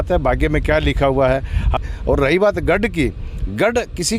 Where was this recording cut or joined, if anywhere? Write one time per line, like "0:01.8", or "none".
0:01.7